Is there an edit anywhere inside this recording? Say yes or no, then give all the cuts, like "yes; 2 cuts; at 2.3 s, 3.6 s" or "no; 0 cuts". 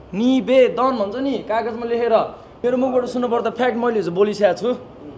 yes; 1 cut; at 2.5 s